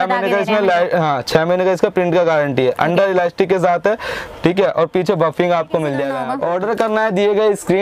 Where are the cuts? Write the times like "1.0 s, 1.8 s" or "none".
6.2 s